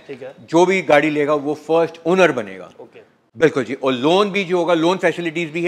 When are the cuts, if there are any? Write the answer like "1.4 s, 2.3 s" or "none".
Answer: none